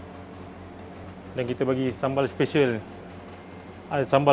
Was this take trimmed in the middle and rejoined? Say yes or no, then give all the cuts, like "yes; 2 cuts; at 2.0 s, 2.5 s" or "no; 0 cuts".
yes; 1 cut; at 1.1 s